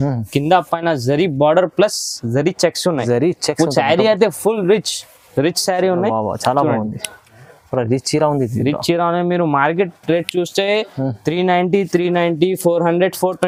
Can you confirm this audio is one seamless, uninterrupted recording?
yes; 0 cuts

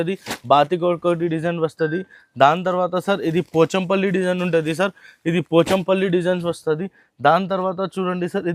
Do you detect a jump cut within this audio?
no; 0 cuts

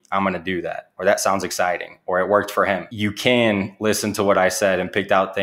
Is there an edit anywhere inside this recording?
yes; 1 cut; at 2.9 s

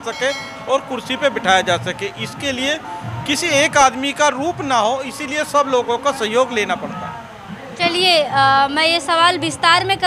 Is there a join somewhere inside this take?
no; 0 cuts

